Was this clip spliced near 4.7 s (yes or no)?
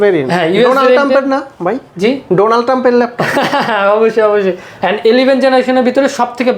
yes